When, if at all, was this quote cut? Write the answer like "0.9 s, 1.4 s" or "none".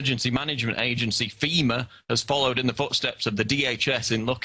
1.0 s